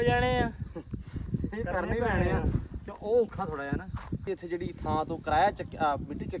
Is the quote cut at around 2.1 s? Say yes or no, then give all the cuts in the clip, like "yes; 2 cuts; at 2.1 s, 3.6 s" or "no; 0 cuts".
no; 1 cut; at 4.2 s